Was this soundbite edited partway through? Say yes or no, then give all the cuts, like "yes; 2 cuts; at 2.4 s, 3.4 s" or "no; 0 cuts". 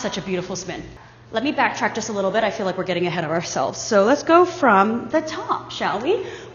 no; 0 cuts